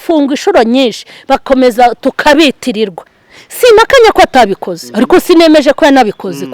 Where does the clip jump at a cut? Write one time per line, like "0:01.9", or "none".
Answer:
0:03.1